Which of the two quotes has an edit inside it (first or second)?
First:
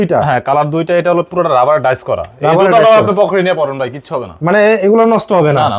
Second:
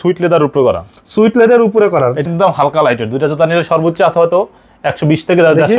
second